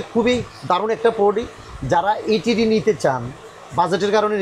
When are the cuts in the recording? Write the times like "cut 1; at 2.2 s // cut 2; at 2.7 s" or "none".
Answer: none